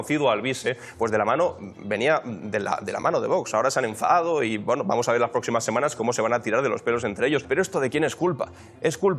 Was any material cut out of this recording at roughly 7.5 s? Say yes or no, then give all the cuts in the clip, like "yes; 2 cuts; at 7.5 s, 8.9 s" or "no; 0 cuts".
yes; 1 cut; at 7.5 s